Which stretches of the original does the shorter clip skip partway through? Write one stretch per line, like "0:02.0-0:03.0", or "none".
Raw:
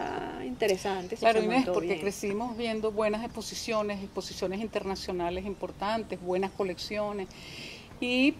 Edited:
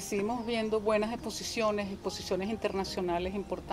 none